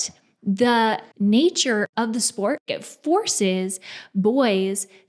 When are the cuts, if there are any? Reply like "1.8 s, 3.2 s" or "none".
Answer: 1.1 s, 1.9 s, 2.8 s